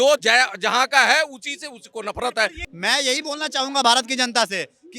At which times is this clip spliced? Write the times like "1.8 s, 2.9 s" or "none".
2.6 s